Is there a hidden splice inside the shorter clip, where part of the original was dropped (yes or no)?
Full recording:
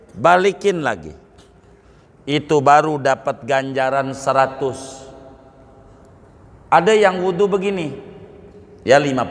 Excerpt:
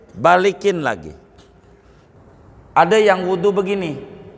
yes